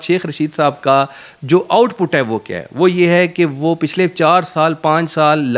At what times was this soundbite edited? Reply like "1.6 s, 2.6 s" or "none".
none